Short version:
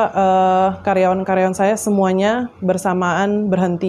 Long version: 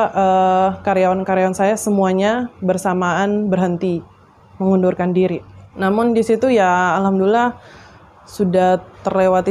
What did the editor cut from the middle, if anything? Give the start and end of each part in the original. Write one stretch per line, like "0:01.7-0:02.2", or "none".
none